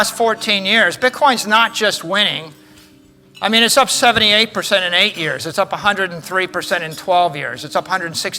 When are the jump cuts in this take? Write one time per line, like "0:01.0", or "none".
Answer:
none